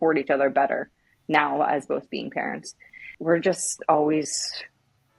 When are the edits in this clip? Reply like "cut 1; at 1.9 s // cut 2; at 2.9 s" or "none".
cut 1; at 3.1 s

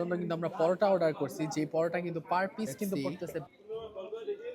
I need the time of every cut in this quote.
cut 1; at 3.5 s

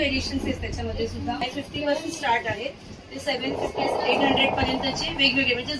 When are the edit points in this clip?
cut 1; at 1.4 s

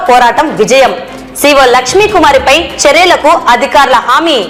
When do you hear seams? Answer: none

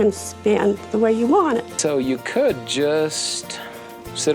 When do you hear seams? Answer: cut 1; at 1.7 s

